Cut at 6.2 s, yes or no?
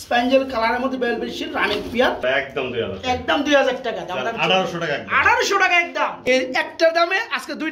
yes